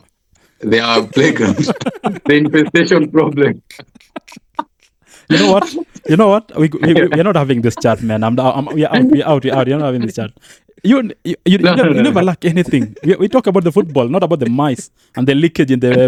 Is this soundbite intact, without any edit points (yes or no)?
yes